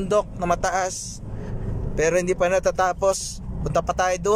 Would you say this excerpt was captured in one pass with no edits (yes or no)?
yes